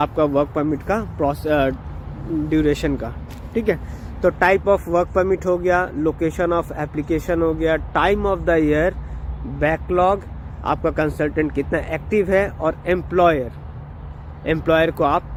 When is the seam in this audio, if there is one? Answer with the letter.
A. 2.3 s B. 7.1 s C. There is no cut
C